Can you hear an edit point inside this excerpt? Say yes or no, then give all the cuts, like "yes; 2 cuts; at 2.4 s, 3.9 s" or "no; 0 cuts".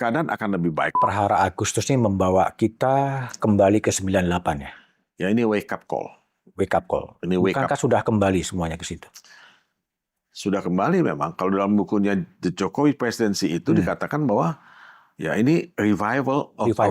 yes; 1 cut; at 1.0 s